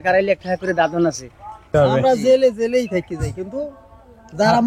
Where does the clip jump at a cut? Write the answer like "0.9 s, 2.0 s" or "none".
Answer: 1.7 s